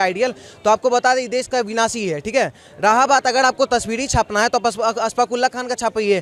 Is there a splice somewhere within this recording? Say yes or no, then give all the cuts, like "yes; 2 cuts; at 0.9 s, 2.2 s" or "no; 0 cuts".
no; 0 cuts